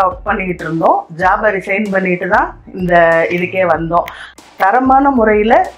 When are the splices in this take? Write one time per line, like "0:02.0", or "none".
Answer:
0:04.2